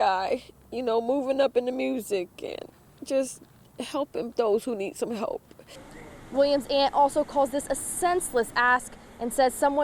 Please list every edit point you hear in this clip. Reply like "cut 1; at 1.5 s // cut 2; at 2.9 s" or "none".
cut 1; at 5.7 s

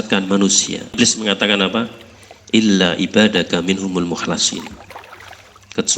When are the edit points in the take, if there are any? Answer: cut 1; at 0.9 s

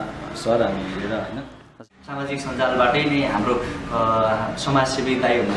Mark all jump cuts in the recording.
cut 1; at 1.8 s

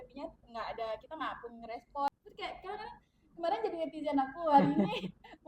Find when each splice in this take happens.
cut 1; at 2.1 s

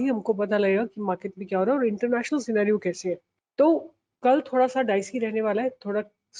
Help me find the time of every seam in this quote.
none

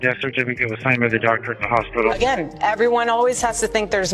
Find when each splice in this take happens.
cut 1; at 2.2 s

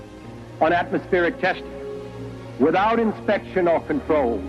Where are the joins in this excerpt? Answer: cut 1; at 1.0 s

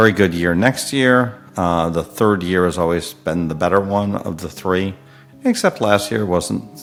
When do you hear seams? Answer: none

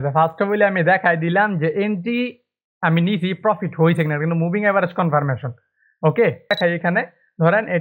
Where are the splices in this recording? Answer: cut 1; at 6.5 s

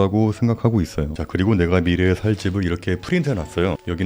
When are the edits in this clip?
cut 1; at 1.1 s

